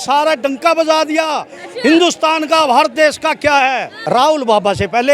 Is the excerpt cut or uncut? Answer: cut